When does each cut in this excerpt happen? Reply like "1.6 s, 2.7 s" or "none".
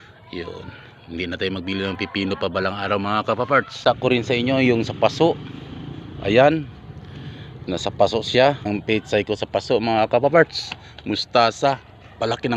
3.8 s, 8.7 s